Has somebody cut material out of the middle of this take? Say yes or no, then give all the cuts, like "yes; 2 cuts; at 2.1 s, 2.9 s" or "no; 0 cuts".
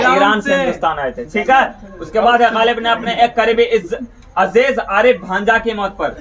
no; 0 cuts